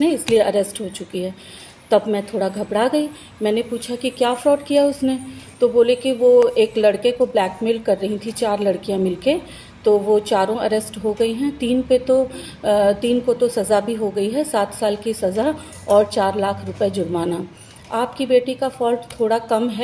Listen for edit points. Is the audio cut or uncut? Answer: uncut